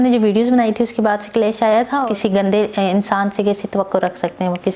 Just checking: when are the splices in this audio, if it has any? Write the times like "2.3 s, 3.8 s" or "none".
2.1 s